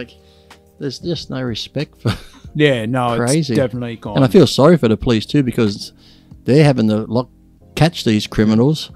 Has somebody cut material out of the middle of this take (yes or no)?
no